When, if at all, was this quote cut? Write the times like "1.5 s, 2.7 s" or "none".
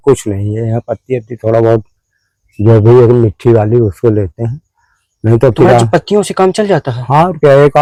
none